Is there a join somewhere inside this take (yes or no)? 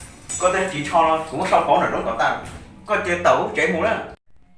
no